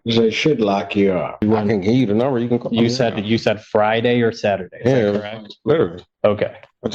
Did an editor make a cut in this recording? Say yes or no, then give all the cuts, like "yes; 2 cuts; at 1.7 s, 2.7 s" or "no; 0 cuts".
yes; 1 cut; at 1.4 s